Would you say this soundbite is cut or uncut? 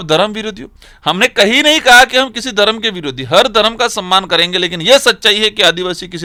uncut